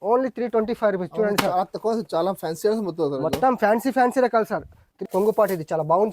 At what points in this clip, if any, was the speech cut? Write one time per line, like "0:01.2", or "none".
0:05.0